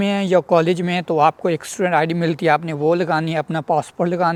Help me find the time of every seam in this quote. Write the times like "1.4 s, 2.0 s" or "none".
none